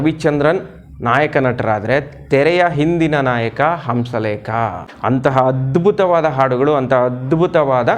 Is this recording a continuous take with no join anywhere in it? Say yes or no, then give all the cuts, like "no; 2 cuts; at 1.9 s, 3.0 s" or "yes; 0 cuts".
yes; 0 cuts